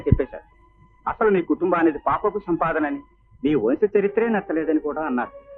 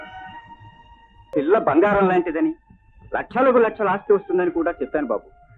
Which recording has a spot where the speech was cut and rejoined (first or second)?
second